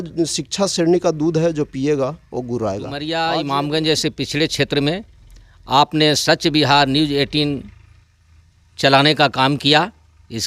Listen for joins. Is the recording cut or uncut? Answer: cut